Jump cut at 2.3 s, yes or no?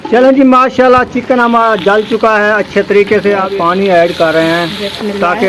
no